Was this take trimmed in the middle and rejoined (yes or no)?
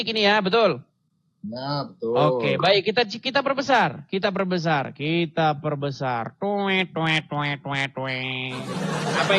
no